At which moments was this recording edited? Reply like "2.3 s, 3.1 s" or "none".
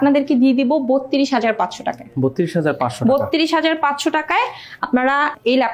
none